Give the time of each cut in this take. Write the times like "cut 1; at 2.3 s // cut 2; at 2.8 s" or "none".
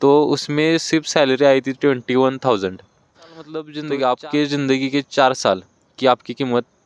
cut 1; at 3.5 s